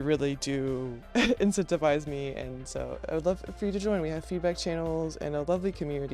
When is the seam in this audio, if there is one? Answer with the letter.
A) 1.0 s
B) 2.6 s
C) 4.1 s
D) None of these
A